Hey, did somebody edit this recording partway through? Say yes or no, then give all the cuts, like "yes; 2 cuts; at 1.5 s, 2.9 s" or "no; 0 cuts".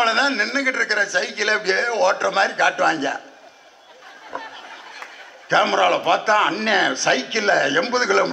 no; 0 cuts